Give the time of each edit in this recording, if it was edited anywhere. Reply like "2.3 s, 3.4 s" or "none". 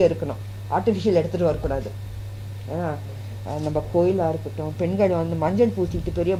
none